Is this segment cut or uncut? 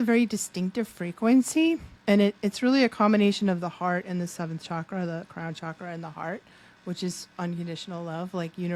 uncut